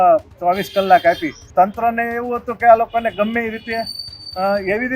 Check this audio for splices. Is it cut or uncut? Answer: cut